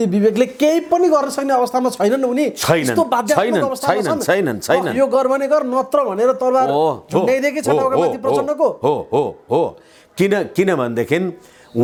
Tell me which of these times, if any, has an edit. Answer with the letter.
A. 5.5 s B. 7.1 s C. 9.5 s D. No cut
D